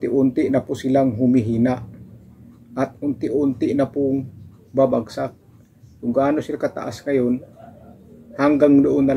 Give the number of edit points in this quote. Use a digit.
0